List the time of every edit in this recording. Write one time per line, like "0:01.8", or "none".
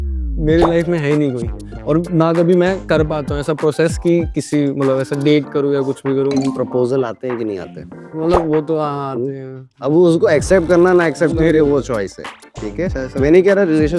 none